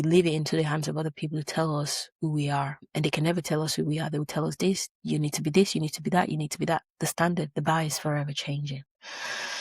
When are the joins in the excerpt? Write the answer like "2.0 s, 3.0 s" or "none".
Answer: 2.8 s